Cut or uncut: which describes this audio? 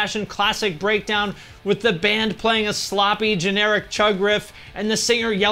uncut